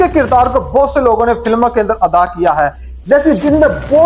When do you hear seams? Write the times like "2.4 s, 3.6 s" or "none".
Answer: none